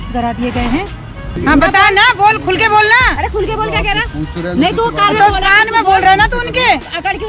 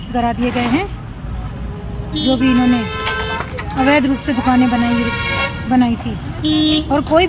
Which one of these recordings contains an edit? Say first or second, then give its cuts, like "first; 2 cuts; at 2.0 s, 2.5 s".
first; 1 cut; at 1.3 s